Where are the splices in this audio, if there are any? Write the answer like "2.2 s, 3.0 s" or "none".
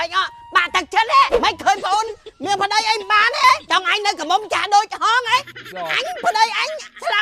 1.3 s, 3.6 s, 5.7 s